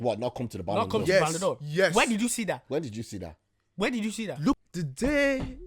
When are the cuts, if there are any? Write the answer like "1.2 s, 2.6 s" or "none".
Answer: 4.6 s